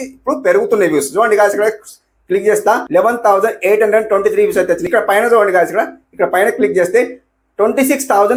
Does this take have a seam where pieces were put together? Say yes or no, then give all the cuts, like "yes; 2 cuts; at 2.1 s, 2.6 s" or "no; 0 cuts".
no; 0 cuts